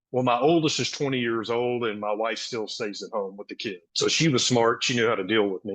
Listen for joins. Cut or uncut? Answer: cut